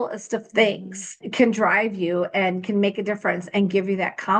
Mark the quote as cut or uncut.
cut